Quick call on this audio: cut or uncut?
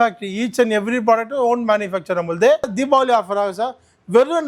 cut